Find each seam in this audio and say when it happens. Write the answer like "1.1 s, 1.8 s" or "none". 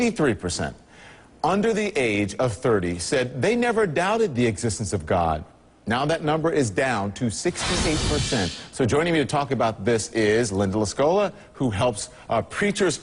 none